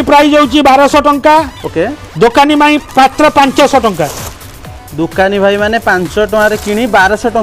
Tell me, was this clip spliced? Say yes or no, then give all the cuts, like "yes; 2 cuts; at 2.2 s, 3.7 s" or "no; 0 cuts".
no; 0 cuts